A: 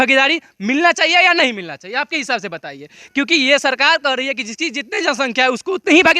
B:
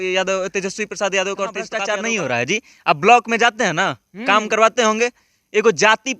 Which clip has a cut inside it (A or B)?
B